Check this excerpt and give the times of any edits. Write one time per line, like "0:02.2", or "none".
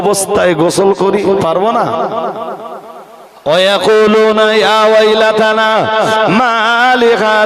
0:03.3